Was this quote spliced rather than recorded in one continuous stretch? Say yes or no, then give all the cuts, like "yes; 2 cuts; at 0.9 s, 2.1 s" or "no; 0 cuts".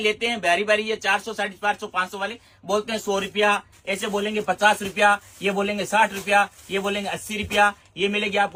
no; 0 cuts